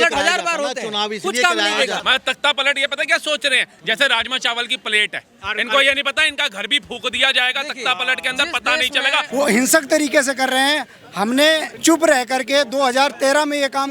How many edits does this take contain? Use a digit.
3